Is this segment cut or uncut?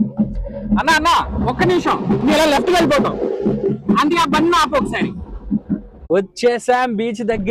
cut